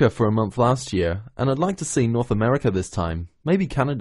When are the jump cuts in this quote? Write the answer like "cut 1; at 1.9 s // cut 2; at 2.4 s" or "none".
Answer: none